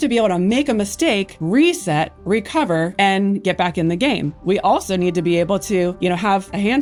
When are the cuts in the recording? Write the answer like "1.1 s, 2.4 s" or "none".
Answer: none